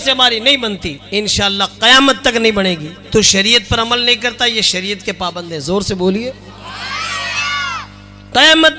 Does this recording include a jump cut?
no; 0 cuts

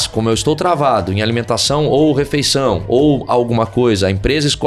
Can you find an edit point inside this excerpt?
no; 0 cuts

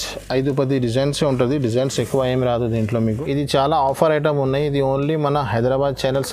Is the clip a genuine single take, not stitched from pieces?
no; 1 cut; at 3.0 s

